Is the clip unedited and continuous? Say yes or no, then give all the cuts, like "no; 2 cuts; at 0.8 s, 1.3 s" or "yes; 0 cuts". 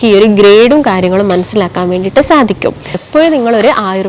no; 1 cut; at 3.0 s